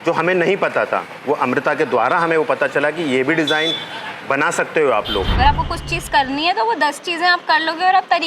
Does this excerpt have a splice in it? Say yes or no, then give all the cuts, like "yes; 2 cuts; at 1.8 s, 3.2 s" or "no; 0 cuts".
yes; 1 cut; at 5.3 s